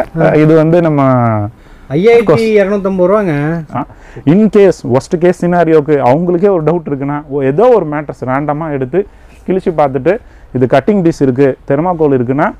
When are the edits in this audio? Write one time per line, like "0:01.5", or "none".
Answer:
0:03.7